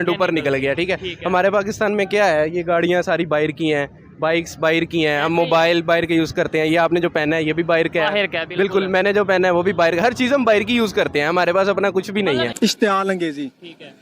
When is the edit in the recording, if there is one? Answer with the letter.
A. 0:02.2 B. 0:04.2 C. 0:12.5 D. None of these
C